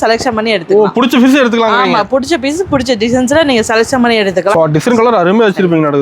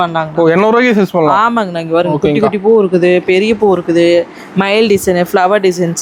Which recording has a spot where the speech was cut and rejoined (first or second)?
first